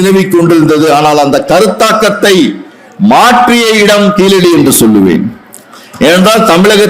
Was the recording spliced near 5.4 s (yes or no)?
no